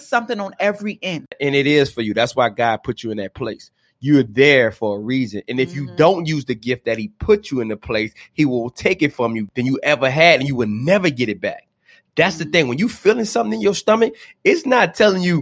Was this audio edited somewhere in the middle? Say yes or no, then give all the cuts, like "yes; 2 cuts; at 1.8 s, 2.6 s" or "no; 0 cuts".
yes; 2 cuts; at 1.4 s, 9.5 s